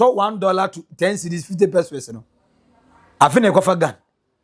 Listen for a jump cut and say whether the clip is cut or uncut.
uncut